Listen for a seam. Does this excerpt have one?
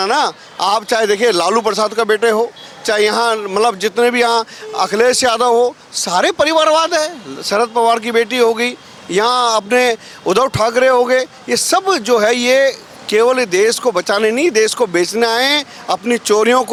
no; 0 cuts

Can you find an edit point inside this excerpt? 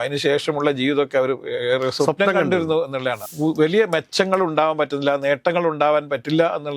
yes; 1 cut; at 3.2 s

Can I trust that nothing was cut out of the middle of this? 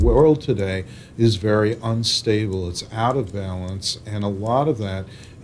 yes; 0 cuts

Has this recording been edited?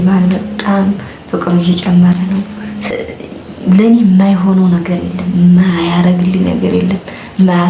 no; 0 cuts

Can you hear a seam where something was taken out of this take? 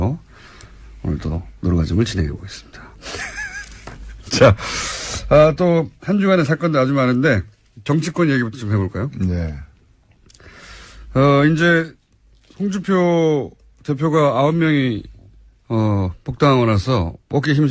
yes; 1 cut; at 9.4 s

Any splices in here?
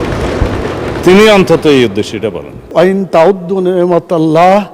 yes; 1 cut; at 2.7 s

